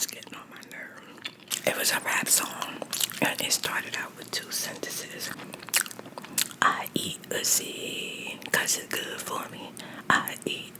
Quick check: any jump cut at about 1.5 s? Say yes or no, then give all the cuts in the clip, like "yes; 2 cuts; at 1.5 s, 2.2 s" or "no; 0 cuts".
yes; 2 cuts; at 1.5 s, 5.3 s